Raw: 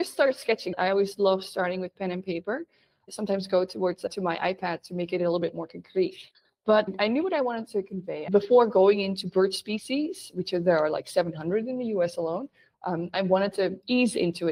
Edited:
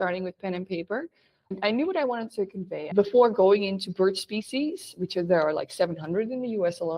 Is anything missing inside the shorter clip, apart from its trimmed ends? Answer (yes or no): yes